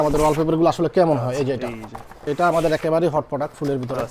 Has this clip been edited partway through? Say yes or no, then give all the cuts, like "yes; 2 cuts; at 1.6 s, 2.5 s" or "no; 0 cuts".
yes; 1 cut; at 2.2 s